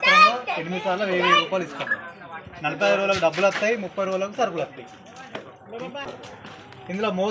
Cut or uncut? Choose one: cut